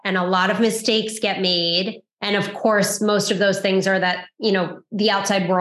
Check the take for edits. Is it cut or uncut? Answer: uncut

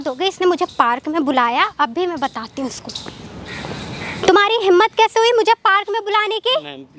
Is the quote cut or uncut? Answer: uncut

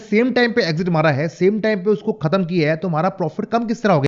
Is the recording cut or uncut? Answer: uncut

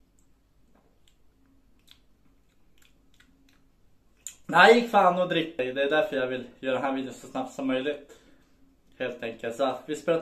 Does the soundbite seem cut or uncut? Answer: cut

